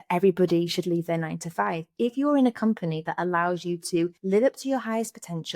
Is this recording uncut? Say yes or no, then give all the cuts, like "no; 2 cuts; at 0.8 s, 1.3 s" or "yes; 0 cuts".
no; 1 cut; at 4.2 s